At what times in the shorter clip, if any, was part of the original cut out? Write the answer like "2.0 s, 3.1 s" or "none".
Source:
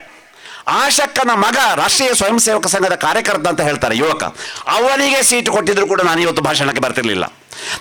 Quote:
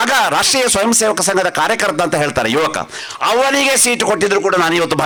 none